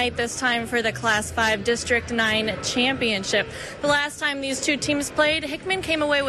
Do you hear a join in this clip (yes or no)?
no